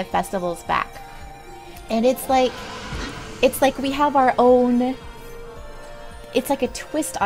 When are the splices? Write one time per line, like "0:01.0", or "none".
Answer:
0:03.2